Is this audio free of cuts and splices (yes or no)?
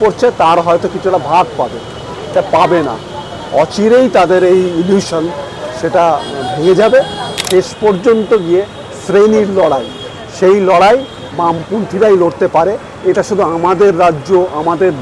no